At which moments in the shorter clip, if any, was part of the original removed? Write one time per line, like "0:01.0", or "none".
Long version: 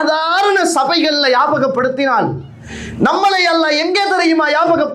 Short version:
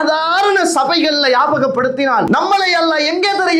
0:02.3